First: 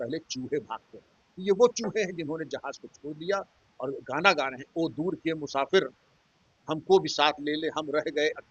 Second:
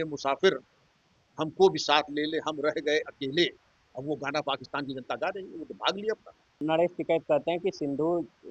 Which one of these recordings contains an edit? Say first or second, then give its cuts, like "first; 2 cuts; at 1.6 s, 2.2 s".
second; 1 cut; at 6.6 s